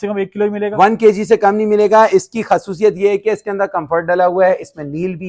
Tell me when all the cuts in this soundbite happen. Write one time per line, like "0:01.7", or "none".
none